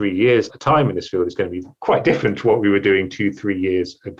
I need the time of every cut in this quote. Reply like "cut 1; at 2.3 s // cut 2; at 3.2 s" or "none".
cut 1; at 1.7 s